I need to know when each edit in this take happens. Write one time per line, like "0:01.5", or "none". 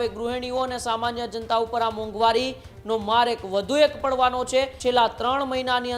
0:04.7